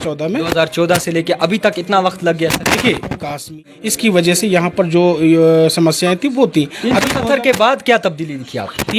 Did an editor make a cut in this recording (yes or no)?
yes